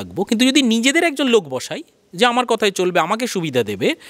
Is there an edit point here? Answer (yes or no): no